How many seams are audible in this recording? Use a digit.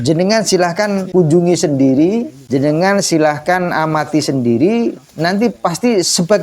2